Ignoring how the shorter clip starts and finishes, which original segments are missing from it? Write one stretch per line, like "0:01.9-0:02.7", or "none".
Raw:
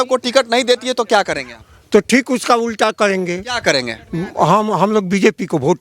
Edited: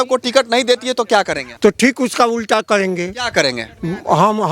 0:01.4-0:01.7

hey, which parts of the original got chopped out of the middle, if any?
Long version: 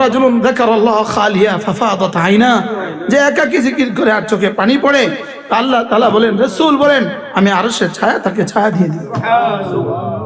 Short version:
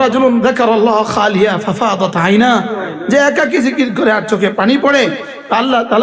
none

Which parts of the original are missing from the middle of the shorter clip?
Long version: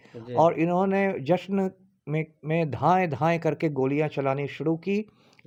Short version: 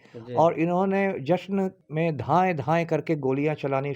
0:01.8-0:02.4

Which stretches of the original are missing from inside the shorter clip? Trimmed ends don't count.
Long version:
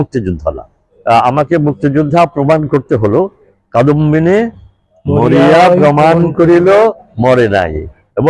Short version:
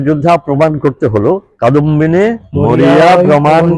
0:03.4-0:03.6
0:04.6-0:05.0

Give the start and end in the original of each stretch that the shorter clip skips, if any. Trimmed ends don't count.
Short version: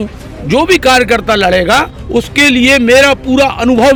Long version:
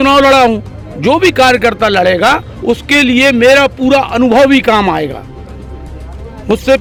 none

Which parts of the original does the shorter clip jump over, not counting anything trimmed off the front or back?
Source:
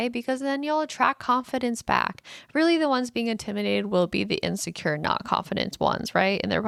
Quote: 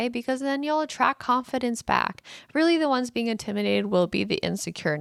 none

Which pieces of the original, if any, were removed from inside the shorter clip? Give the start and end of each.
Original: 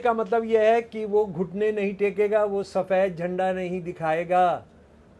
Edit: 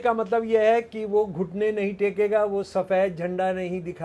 none

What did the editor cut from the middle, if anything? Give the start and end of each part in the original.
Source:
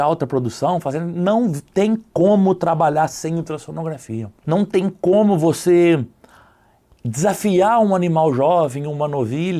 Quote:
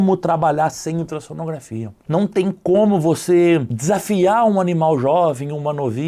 0:06.1-0:07.1

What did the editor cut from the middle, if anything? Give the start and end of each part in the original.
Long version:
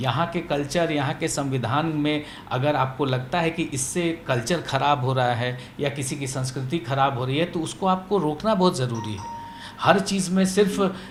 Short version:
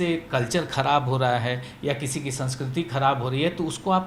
none

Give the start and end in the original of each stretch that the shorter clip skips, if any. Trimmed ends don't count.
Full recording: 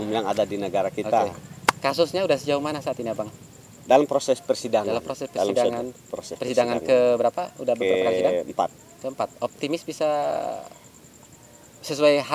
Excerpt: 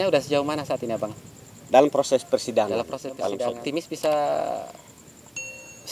0:05.7-0:09.5

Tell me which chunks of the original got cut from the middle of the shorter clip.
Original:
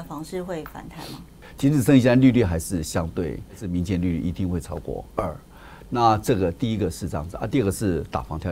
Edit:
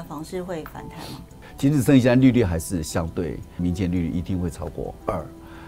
0:03.5-0:03.6

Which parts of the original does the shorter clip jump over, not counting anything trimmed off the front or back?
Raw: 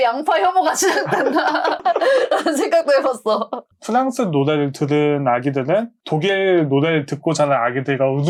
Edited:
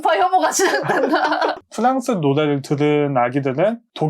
0:01.8-0:03.7

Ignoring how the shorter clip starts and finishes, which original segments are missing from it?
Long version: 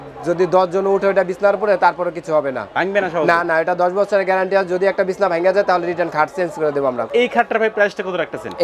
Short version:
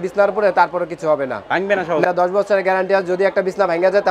0:03.3-0:03.7

